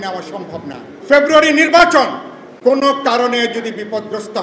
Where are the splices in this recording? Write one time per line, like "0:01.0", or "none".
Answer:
0:00.9

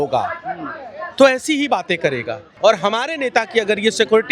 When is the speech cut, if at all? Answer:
0:02.5

